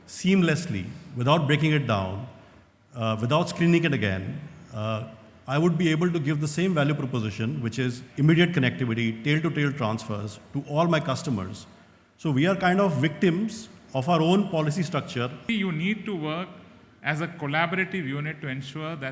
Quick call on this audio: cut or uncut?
cut